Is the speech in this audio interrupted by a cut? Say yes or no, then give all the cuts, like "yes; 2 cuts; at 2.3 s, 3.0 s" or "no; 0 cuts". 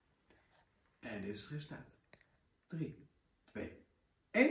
no; 0 cuts